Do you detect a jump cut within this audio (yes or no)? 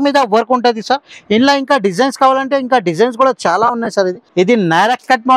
yes